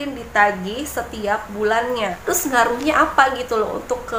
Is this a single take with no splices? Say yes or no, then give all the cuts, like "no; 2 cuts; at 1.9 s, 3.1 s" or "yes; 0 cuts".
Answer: no; 1 cut; at 2.2 s